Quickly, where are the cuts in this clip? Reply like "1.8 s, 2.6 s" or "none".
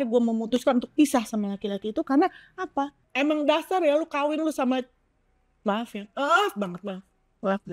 3.0 s